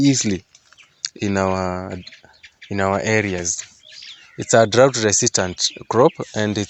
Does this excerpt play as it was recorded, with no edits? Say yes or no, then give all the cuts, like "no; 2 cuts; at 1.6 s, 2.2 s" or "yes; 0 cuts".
yes; 0 cuts